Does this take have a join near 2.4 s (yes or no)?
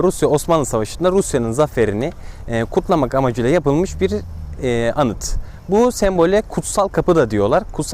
no